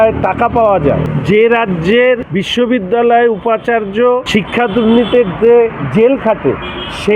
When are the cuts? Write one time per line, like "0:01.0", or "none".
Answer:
0:01.1
0:02.4
0:04.2